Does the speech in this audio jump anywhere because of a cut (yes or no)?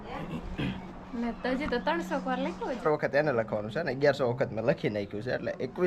yes